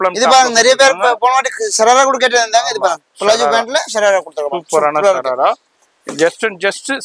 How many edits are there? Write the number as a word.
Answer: zero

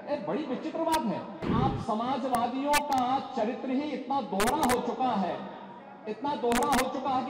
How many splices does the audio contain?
one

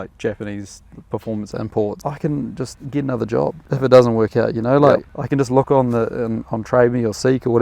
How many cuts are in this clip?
four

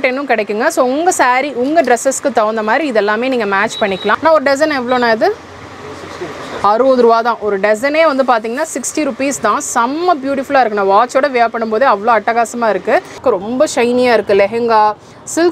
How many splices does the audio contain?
two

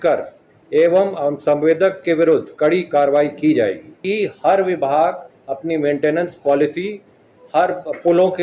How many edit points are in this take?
two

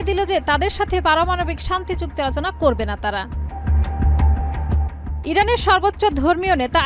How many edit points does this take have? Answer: zero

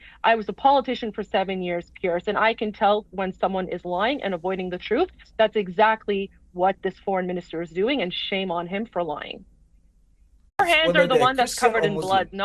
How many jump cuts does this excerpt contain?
one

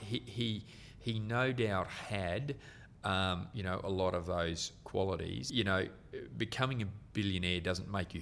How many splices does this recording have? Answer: one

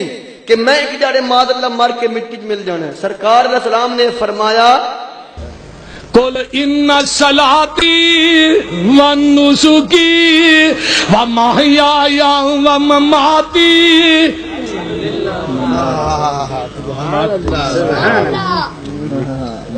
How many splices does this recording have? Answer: zero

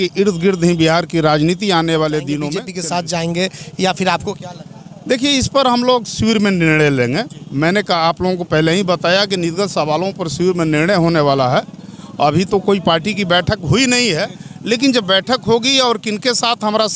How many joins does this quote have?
one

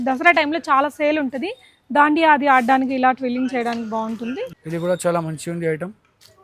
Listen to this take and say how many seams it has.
one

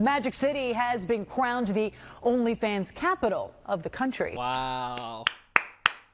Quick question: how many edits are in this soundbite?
one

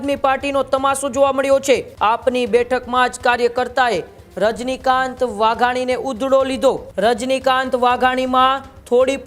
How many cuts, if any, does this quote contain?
two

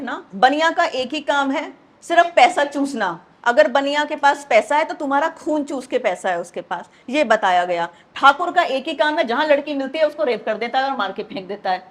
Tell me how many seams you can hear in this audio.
zero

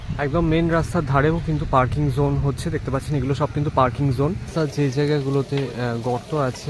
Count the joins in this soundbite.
one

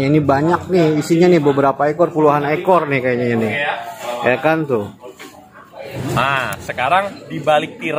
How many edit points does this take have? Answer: one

